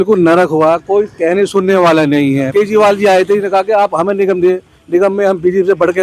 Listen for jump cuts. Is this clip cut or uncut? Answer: cut